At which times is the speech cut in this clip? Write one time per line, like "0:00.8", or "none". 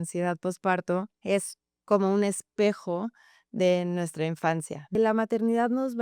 0:01.1
0:05.0